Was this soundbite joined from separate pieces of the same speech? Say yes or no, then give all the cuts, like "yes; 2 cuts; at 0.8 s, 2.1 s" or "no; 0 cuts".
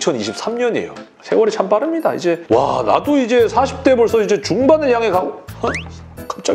yes; 1 cut; at 1.1 s